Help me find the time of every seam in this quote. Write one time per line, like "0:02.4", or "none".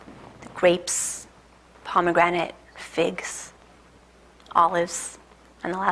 0:03.2